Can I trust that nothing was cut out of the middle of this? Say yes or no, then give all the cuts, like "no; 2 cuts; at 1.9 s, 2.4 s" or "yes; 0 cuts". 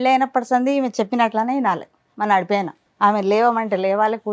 no; 1 cut; at 2.8 s